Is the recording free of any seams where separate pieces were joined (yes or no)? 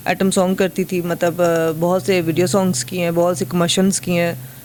yes